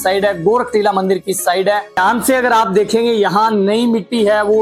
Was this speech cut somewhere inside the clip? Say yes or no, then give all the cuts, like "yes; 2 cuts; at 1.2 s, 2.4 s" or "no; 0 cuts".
yes; 1 cut; at 2.0 s